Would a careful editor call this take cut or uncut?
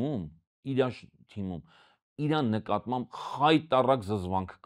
uncut